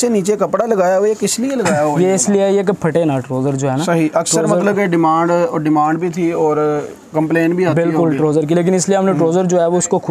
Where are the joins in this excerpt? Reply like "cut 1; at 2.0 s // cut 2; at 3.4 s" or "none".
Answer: none